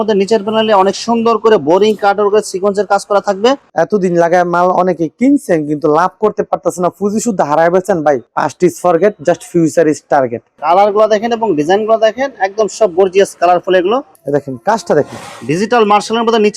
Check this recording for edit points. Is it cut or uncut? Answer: cut